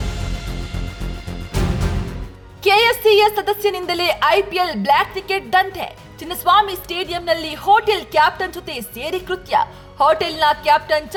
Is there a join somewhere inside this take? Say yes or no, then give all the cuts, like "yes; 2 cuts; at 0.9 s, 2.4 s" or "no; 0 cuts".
no; 0 cuts